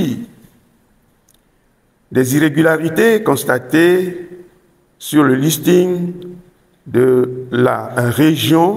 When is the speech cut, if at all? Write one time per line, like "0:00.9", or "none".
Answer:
none